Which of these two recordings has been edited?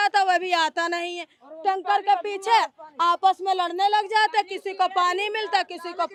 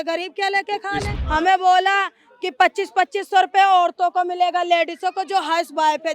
second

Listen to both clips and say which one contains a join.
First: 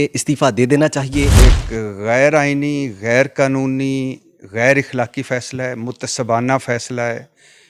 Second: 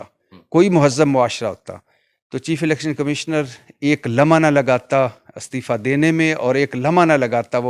first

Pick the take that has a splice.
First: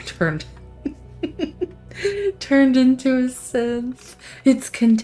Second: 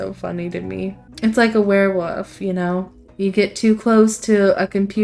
second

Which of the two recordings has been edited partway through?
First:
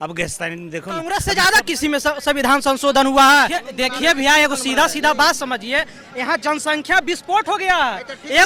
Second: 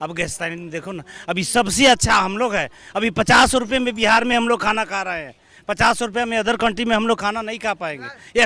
first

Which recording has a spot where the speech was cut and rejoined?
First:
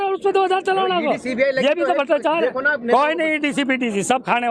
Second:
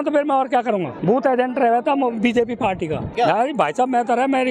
second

